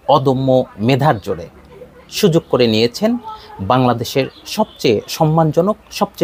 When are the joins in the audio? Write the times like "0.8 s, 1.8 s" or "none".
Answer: none